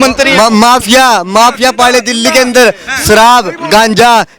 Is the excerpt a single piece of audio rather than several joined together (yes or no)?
yes